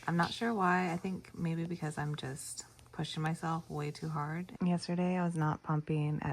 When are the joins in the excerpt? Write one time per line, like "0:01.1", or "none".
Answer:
0:04.5